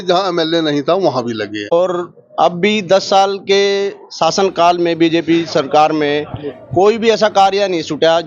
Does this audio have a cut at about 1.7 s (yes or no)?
yes